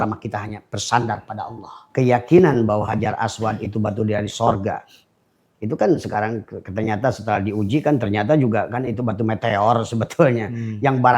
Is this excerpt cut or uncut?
cut